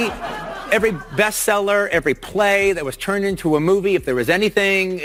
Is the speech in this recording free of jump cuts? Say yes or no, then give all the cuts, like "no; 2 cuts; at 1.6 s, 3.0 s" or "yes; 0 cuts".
yes; 0 cuts